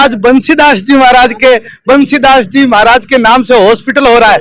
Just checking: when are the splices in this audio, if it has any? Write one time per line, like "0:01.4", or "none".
none